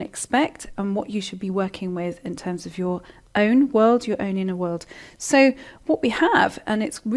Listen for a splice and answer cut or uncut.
cut